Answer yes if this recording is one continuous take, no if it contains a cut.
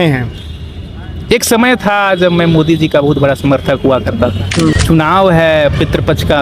no